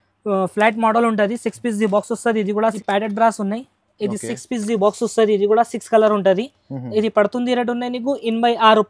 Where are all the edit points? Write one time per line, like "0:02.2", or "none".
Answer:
0:02.8